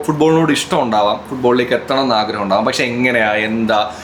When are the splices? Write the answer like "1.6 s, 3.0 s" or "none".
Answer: none